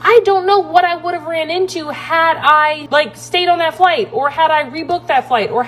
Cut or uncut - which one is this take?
cut